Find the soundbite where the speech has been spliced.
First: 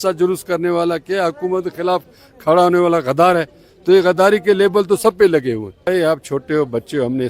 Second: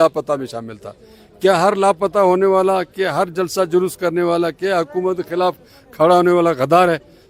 first; 1 cut; at 5.9 s

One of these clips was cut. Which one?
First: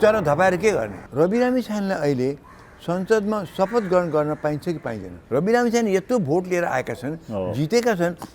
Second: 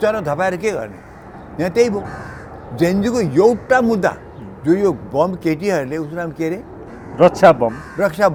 first; 2 cuts; at 1.0 s, 5.1 s

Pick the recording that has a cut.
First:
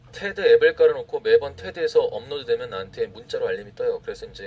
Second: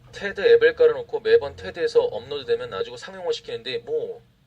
first; 1 cut; at 2.8 s

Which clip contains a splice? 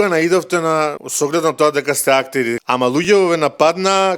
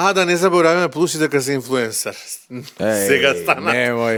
first; 2 cuts; at 1.0 s, 2.9 s

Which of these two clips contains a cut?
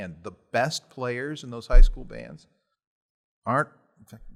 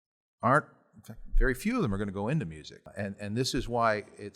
second; 1 cut; at 2.9 s

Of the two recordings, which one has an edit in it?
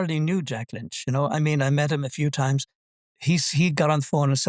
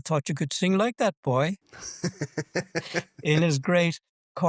first; 1 cut; at 2.9 s

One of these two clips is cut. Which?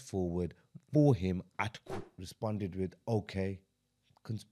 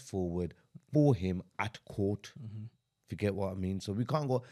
first; 1 cut; at 1.9 s

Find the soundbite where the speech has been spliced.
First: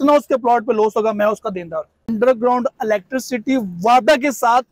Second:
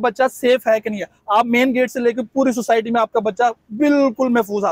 first; 1 cut; at 2.0 s

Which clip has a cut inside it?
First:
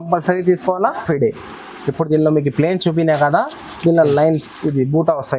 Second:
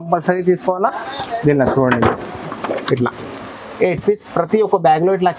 first; 1 cut; at 1.0 s

